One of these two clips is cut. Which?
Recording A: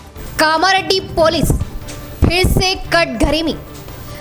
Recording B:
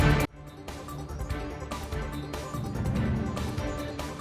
B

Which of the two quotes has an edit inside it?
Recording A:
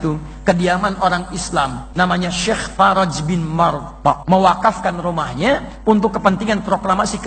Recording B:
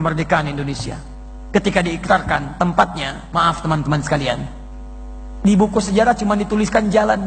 A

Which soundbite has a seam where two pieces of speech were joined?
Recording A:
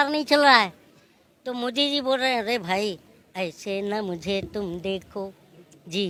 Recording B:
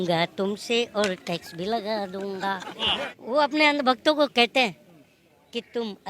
B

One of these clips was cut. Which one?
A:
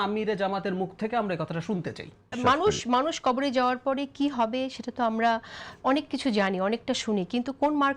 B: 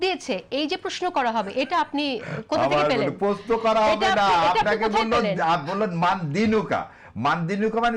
A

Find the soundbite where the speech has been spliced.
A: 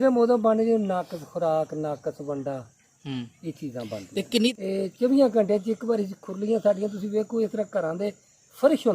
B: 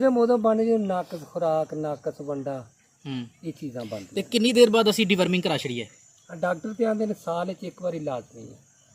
A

